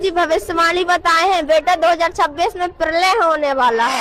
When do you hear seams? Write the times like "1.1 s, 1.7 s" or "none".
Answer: none